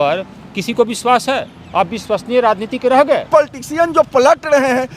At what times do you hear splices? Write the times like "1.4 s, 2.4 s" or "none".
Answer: 3.3 s